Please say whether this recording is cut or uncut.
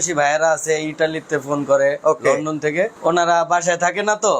cut